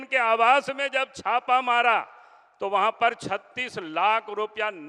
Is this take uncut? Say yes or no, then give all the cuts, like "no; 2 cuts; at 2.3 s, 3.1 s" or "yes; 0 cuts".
yes; 0 cuts